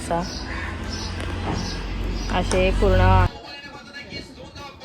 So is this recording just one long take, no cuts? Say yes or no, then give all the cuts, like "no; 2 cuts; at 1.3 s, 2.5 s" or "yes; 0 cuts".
no; 1 cut; at 3.3 s